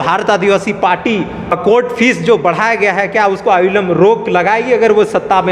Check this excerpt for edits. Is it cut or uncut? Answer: cut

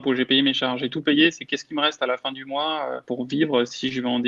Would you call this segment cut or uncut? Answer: cut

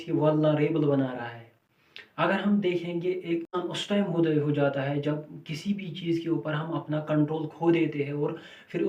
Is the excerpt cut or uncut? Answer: cut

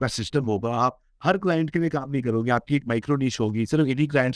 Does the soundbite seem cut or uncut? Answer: uncut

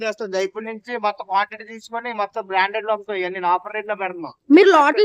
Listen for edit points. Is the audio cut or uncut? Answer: uncut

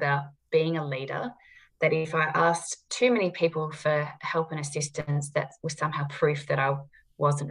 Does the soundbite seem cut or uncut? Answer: uncut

